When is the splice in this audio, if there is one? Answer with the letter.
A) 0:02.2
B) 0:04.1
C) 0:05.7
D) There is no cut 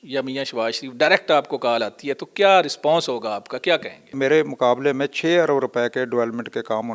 B